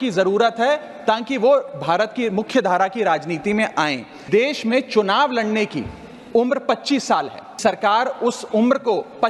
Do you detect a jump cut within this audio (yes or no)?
yes